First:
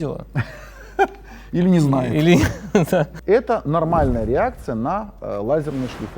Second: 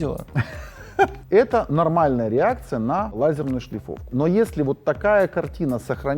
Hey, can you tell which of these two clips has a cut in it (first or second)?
second